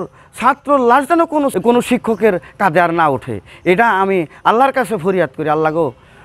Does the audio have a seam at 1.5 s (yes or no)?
yes